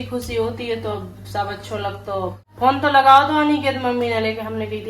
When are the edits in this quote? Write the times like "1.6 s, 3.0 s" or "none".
2.4 s